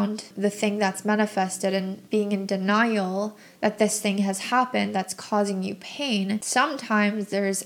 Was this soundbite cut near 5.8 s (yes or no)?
no